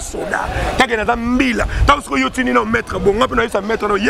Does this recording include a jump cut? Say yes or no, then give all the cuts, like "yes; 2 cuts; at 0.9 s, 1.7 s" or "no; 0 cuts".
no; 0 cuts